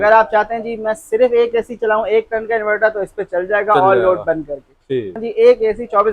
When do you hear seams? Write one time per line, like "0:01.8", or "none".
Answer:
0:05.2